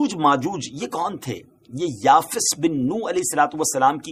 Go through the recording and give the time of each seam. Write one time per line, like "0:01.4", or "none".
none